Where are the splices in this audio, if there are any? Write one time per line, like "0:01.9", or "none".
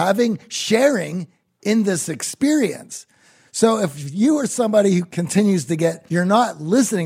0:05.1
0:06.0